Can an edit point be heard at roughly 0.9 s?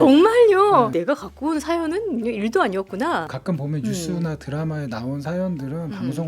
yes; 2 cuts; at 0.9 s, 3.3 s

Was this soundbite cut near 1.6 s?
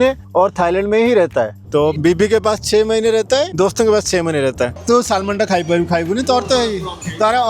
yes; 2 cuts; at 1.6 s, 4.8 s

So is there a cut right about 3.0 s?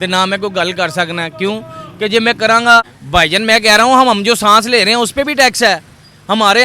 yes; 1 cut; at 3.0 s

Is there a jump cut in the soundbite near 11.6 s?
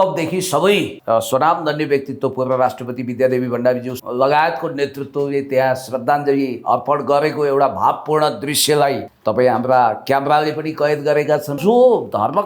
yes; 4 cuts; at 0.9 s, 3.9 s, 9.1 s, 11.6 s

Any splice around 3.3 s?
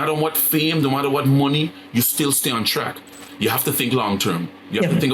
yes; 1 cut; at 3.3 s

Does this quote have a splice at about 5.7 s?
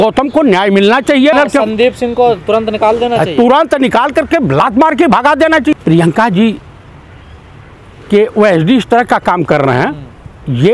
yes; 2 cuts; at 1.3 s, 5.7 s

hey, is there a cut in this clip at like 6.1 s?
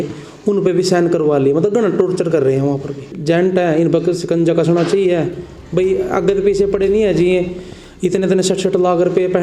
no; 1 cut; at 3.1 s

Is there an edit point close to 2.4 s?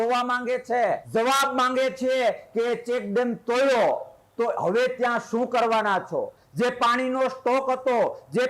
no; 1 cut; at 1.0 s

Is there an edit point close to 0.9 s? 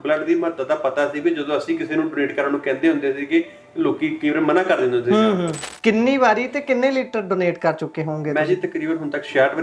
no; 1 cut; at 5.6 s

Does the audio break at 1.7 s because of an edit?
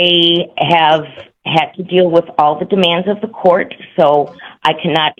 no; 0 cuts

